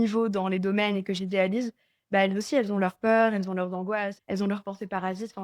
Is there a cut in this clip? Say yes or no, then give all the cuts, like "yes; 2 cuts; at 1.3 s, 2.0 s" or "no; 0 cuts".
yes; 1 cut; at 4.2 s